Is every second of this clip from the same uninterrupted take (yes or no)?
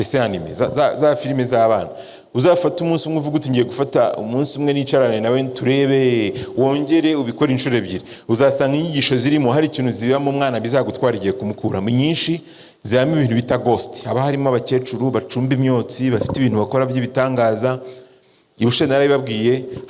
yes